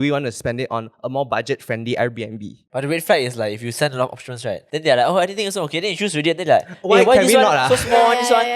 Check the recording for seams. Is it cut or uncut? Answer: cut